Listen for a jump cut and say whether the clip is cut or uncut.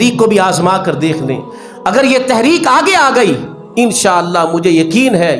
uncut